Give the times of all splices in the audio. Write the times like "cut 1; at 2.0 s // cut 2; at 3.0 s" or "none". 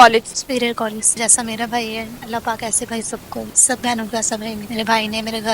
cut 1; at 1.2 s